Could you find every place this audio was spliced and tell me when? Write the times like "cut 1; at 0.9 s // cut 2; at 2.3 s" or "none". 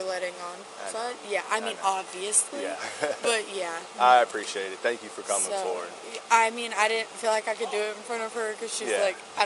none